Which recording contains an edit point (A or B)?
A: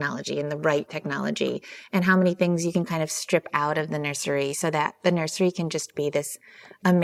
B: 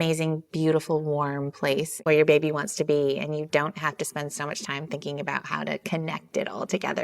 B